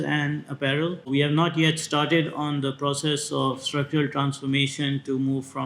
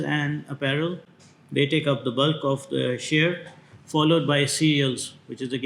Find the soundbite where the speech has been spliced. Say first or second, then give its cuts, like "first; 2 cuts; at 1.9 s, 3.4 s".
first; 1 cut; at 1.1 s